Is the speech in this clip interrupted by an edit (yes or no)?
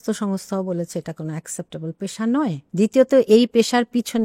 yes